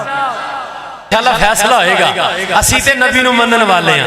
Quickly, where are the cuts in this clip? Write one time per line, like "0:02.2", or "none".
0:01.1